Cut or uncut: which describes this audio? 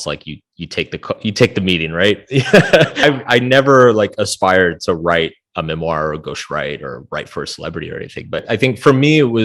cut